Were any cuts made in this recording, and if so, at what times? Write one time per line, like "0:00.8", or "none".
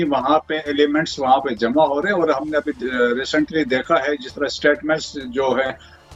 none